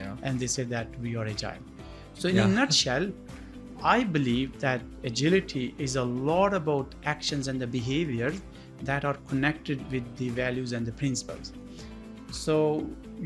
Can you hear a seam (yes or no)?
no